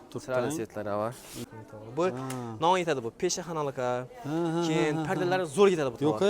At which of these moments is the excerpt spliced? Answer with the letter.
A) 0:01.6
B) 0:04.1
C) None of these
A